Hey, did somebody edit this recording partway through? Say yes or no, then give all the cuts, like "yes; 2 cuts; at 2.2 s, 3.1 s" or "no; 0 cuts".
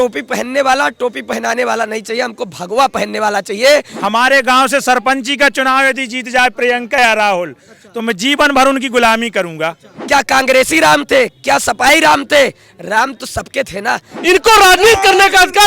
yes; 3 cuts; at 3.9 s, 9.9 s, 14.1 s